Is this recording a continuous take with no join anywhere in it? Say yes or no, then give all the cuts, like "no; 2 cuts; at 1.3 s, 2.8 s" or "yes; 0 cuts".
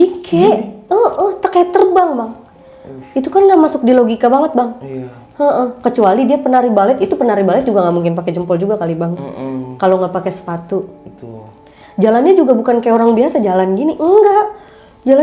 no; 1 cut; at 11.8 s